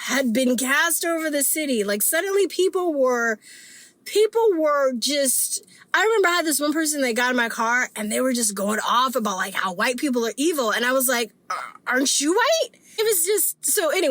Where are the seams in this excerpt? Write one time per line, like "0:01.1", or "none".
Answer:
0:12.8